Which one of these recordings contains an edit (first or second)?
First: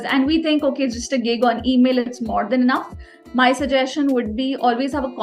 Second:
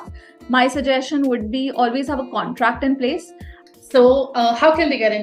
second